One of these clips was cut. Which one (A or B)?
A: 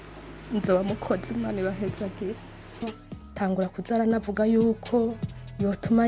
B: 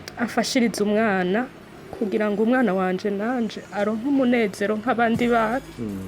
A